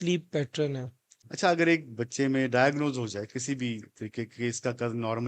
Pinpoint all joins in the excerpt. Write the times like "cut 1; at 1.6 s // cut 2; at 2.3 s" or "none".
cut 1; at 1.3 s